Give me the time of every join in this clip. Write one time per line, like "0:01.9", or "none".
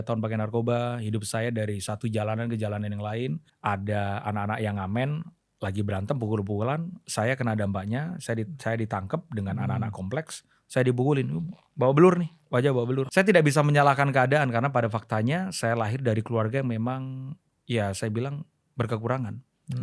0:03.5
0:13.0